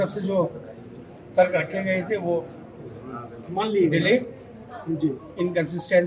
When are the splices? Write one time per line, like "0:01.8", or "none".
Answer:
none